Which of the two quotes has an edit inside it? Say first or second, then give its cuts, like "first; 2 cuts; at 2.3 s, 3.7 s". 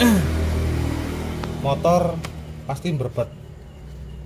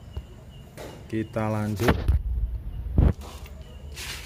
second; 1 cut; at 3.1 s